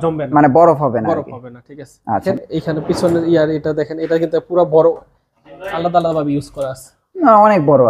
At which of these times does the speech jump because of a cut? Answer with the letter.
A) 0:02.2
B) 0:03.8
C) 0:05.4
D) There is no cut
A